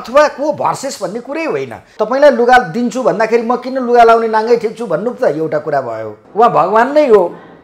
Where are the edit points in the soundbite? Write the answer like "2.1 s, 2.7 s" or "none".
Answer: 1.8 s, 6.2 s